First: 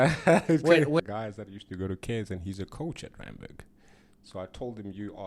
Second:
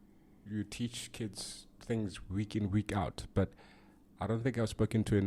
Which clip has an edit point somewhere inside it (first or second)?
first